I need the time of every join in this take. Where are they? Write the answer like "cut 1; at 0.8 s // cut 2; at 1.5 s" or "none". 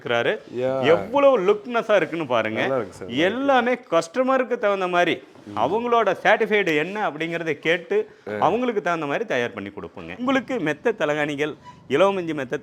none